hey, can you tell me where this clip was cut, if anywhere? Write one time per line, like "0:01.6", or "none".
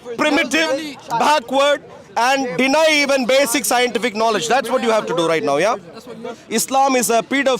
0:06.4